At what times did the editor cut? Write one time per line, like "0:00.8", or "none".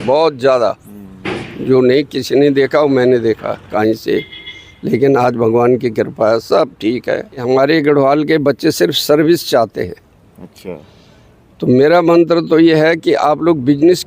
0:03.7
0:07.4